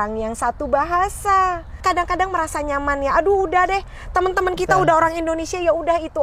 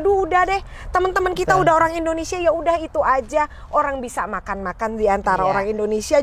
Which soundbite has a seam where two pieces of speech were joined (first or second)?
first